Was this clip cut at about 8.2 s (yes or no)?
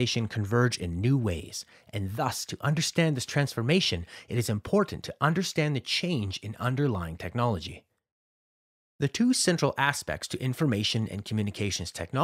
no